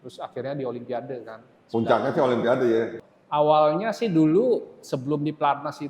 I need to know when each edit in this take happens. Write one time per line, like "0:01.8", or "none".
0:03.0